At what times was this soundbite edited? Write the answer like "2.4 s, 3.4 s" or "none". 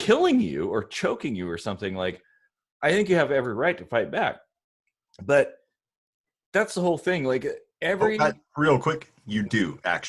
none